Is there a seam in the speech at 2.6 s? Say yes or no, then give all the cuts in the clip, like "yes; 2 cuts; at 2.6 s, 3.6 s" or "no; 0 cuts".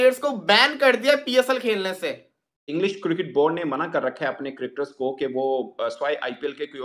yes; 1 cut; at 2.6 s